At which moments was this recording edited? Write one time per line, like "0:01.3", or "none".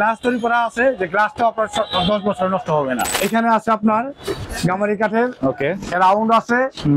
0:03.1
0:04.5